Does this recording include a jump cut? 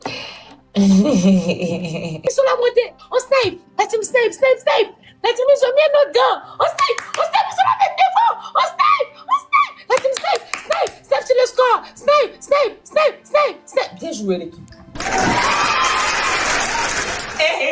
yes; 1 cut; at 2.2 s

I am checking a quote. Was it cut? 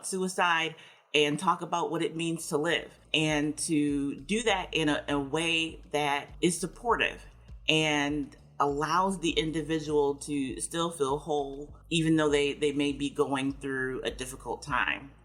no; 0 cuts

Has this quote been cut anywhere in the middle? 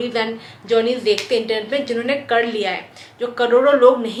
no; 0 cuts

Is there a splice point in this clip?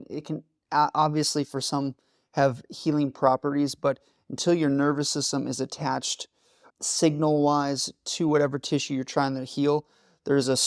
no; 0 cuts

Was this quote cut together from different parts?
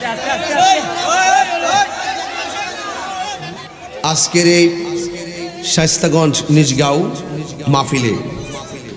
yes; 1 cut; at 3.7 s

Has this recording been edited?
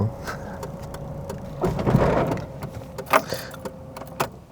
yes; 1 cut; at 1.5 s

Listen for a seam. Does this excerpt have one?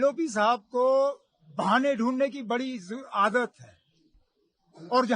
no; 0 cuts

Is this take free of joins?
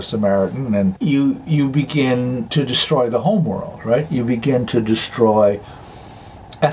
yes; 0 cuts

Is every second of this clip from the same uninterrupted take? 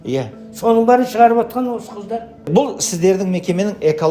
no; 1 cut; at 2.5 s

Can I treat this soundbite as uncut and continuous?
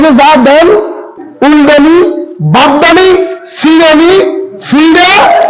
no; 1 cut; at 1.1 s

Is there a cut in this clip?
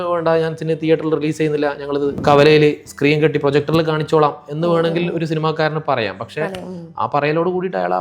yes; 1 cut; at 2.2 s

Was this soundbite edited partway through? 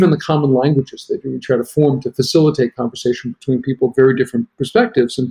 no; 0 cuts

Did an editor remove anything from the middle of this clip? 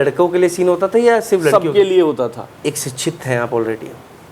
yes; 1 cut; at 2.5 s

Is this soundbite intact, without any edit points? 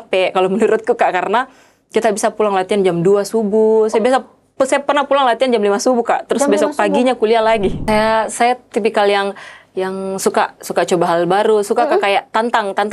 no; 1 cut; at 7.8 s

